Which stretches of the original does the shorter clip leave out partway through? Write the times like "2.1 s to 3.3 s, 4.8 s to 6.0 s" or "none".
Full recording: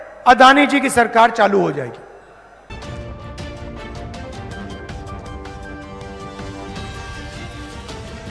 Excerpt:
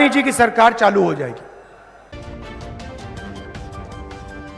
2.7 s to 3.5 s